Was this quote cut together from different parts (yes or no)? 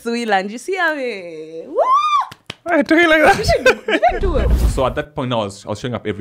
yes